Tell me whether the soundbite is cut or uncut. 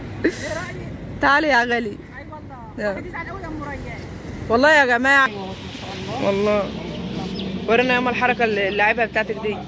cut